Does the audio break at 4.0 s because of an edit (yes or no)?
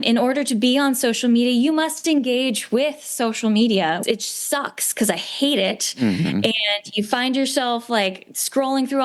yes